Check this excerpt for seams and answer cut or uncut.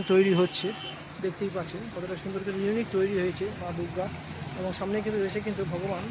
uncut